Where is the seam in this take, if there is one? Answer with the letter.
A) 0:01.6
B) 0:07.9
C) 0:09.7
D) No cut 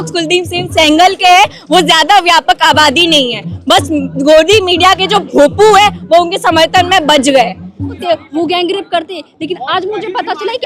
B